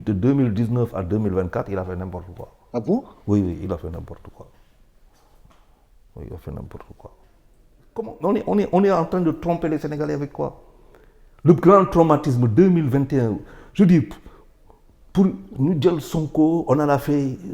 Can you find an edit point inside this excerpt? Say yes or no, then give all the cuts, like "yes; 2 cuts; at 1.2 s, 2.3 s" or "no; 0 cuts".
yes; 1 cut; at 8.1 s